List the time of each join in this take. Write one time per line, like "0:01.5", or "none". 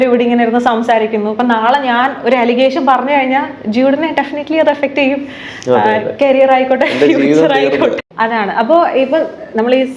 0:08.0